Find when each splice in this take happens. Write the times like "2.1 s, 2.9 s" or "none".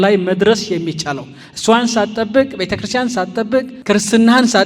3.7 s